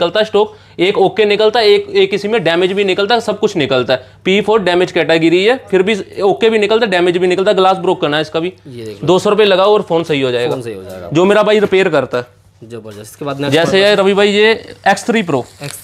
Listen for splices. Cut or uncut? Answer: uncut